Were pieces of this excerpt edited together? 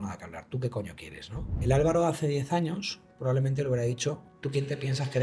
yes; 2 cuts; at 1.5 s, 4.3 s

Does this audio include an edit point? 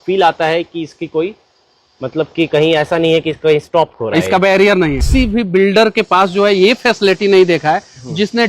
yes; 1 cut; at 5.0 s

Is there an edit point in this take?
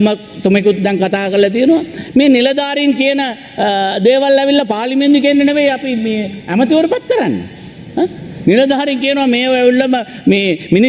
no; 0 cuts

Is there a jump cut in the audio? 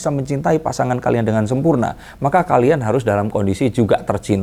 no; 0 cuts

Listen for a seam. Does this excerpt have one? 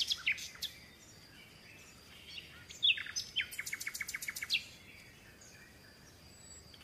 no; 0 cuts

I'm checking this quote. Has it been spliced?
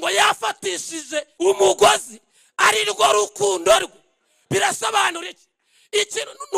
yes; 1 cut; at 1.3 s

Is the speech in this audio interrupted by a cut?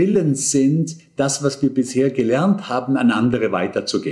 no; 0 cuts

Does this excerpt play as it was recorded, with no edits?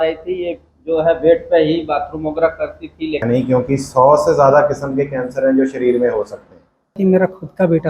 no; 2 cuts; at 3.2 s, 7.0 s

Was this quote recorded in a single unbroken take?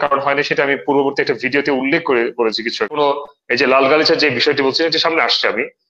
no; 1 cut; at 3.0 s

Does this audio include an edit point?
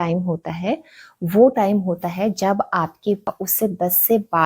yes; 1 cut; at 3.3 s

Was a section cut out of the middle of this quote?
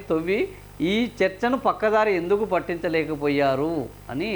no; 0 cuts

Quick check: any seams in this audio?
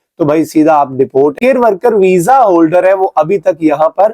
yes; 1 cut; at 1.4 s

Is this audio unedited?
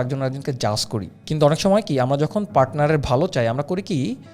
no; 1 cut; at 1.1 s

